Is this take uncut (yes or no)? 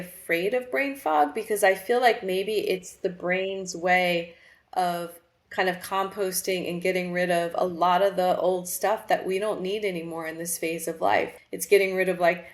no